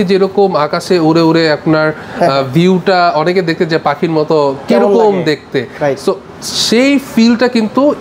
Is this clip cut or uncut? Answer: uncut